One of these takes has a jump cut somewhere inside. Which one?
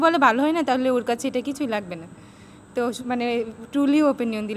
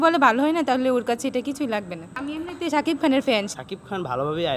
second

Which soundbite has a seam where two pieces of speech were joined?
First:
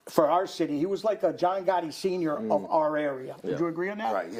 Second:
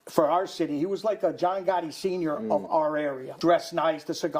second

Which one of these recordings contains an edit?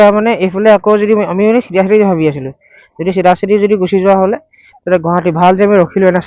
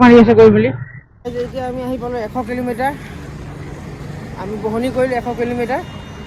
second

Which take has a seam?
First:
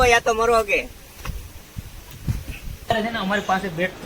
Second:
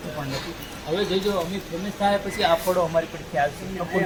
first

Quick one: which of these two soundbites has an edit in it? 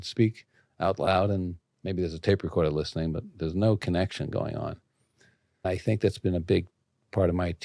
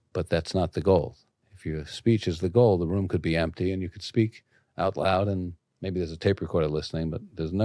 first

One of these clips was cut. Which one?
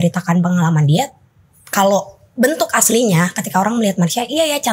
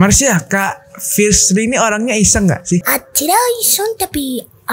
second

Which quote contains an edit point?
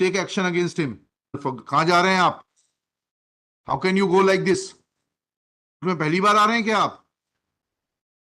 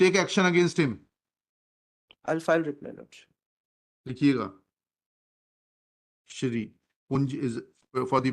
first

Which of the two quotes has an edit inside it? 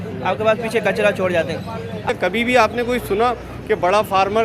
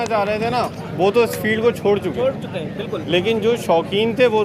first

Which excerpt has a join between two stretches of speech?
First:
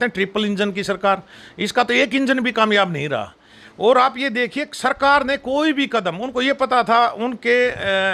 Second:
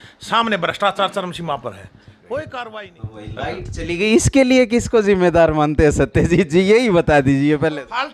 second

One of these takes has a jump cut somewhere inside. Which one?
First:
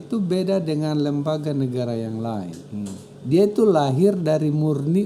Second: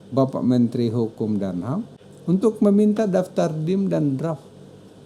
second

